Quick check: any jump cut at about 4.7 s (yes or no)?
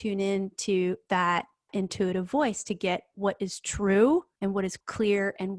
yes